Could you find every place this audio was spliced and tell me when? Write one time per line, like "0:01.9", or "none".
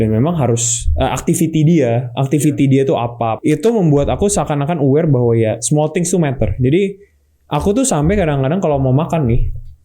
0:03.4